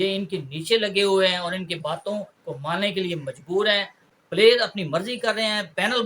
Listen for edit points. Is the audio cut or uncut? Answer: cut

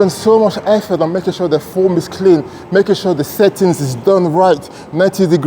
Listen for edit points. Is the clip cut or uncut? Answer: uncut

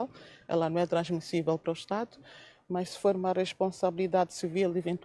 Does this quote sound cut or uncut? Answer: cut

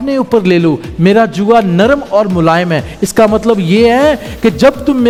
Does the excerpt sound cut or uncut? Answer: uncut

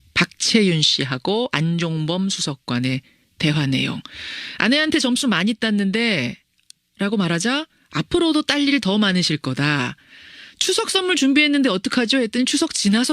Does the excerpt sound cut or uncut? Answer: cut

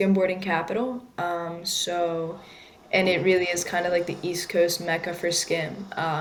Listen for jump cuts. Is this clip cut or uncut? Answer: uncut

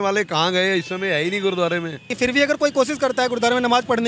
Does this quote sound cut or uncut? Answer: cut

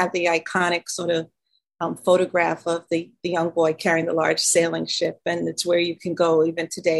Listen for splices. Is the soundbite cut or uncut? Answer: uncut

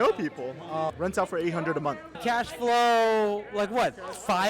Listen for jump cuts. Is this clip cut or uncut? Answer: cut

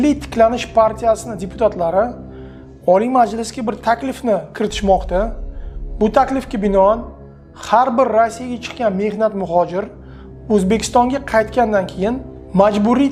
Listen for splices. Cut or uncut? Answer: uncut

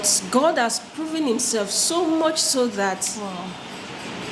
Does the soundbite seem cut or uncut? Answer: uncut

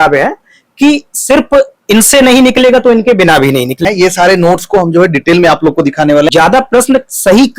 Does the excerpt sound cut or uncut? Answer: cut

